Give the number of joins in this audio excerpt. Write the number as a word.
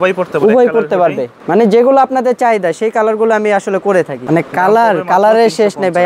two